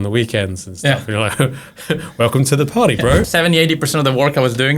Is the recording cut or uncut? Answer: cut